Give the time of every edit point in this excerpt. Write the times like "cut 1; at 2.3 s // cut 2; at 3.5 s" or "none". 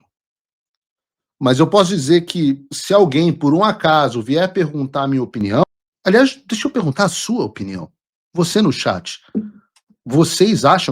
cut 1; at 5.6 s